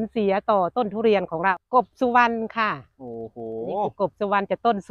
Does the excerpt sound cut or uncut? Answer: cut